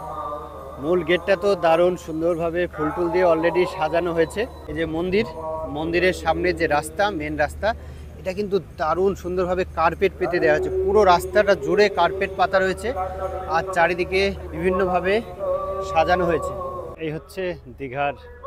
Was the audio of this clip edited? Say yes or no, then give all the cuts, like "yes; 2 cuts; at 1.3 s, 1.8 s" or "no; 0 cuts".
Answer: yes; 2 cuts; at 4.6 s, 16.9 s